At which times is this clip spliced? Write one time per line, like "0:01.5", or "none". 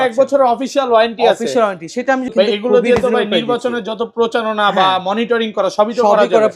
0:02.3